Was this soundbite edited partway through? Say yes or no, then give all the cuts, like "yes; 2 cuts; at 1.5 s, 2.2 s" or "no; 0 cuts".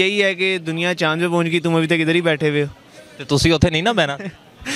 no; 0 cuts